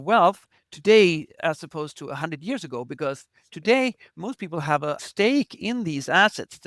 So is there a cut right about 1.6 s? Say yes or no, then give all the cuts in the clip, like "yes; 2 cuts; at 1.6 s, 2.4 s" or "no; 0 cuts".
no; 1 cut; at 5.0 s